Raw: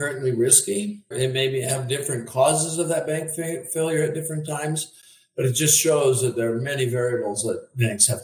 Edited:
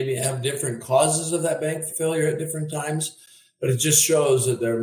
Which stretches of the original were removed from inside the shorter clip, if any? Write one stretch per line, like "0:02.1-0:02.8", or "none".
0:03.4-0:03.7